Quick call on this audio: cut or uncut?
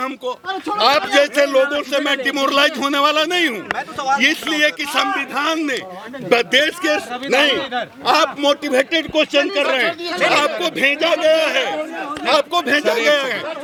uncut